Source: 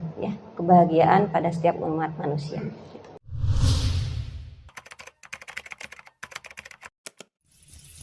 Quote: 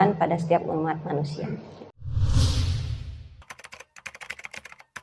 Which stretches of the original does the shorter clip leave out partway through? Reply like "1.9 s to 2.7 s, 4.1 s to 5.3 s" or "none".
3.1 s to 3.2 s